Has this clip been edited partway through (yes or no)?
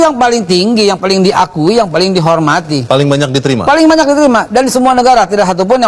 no